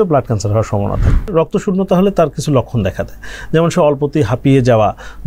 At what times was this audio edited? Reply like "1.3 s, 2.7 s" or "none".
1.3 s